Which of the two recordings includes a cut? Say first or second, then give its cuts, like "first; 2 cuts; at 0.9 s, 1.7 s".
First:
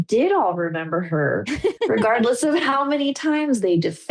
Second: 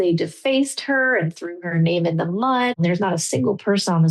second; 1 cut; at 2.8 s